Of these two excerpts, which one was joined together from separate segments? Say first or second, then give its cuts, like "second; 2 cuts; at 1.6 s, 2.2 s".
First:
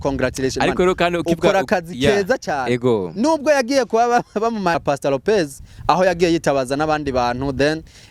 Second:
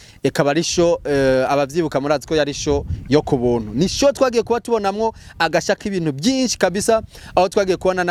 first; 1 cut; at 4.8 s